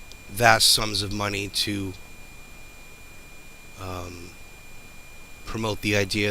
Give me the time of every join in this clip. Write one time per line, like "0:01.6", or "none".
0:01.4

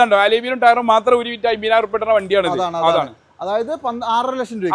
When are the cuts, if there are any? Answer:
none

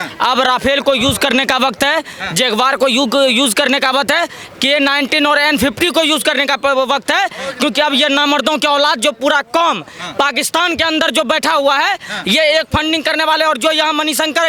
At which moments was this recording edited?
none

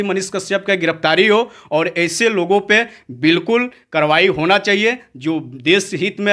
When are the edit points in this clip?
none

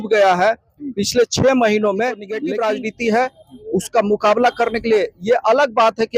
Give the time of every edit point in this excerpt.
0:02.3

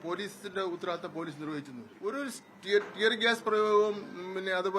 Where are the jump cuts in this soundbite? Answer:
0:01.8

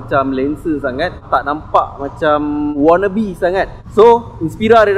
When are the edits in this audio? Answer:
0:01.2
0:02.7
0:03.8

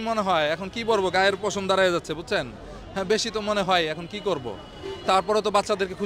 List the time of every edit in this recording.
none

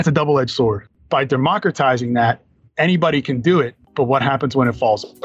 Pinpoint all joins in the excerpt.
0:00.9
0:03.8

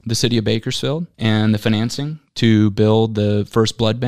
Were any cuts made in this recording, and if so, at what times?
0:01.1

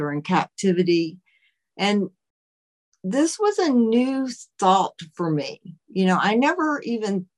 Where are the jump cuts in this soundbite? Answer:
none

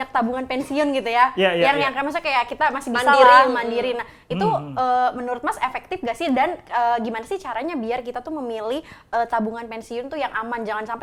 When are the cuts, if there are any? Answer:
none

